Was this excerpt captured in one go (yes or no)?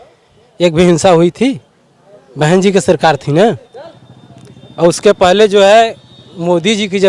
yes